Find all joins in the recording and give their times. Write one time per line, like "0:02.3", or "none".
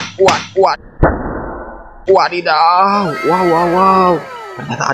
none